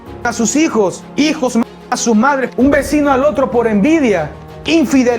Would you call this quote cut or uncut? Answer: cut